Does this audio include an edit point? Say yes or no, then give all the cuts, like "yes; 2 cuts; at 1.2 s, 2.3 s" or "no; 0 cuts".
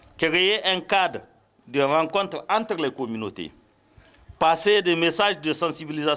no; 0 cuts